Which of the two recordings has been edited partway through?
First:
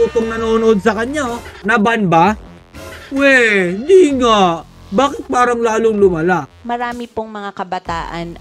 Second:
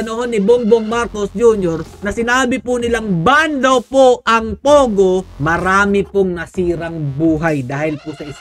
first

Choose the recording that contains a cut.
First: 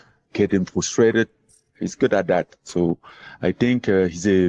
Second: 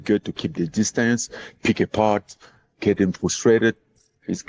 first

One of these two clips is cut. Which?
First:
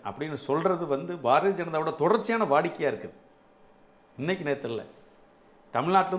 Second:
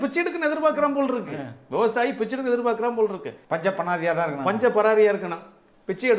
second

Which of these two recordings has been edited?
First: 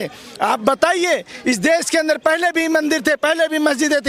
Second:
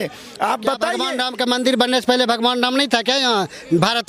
second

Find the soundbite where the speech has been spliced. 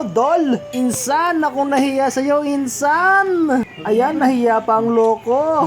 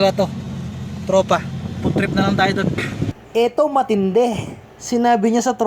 second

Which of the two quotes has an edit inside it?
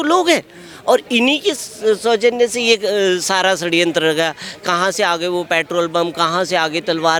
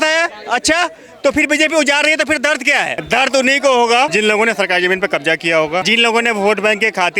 second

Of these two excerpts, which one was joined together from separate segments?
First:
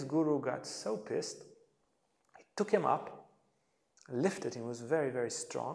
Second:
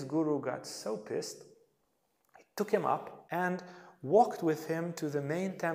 second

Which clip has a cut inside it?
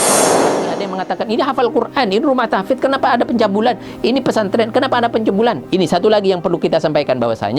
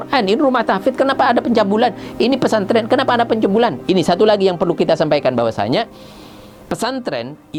first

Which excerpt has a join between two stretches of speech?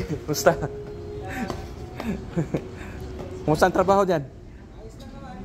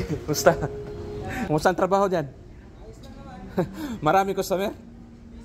second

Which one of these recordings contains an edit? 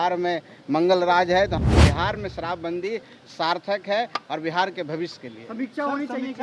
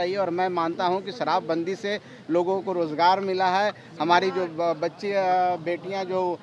first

